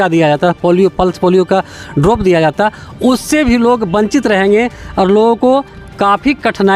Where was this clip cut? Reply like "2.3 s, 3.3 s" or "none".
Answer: none